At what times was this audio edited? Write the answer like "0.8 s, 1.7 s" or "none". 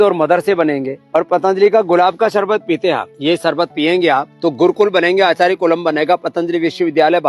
0.9 s, 3.1 s, 4.3 s